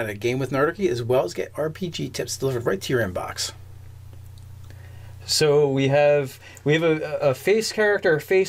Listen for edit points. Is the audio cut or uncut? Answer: cut